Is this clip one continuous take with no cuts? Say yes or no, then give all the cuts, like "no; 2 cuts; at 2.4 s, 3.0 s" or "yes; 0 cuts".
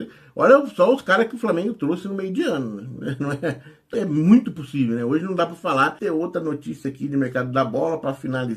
no; 2 cuts; at 3.7 s, 6.0 s